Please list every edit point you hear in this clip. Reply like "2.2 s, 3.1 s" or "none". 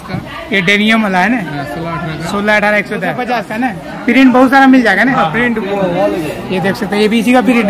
3.3 s